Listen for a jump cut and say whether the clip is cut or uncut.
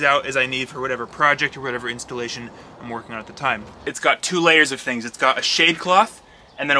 cut